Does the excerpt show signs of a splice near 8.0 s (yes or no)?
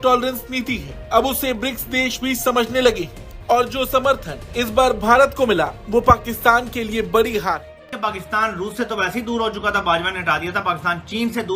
yes